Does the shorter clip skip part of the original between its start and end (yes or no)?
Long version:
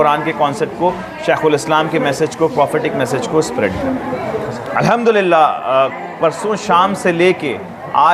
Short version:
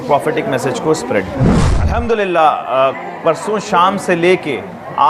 yes